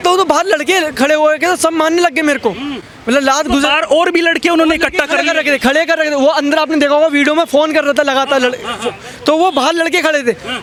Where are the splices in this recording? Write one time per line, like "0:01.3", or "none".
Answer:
none